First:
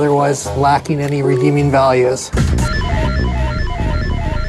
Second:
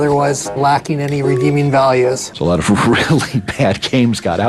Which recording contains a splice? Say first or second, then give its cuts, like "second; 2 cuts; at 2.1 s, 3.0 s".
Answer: second; 1 cut; at 2.3 s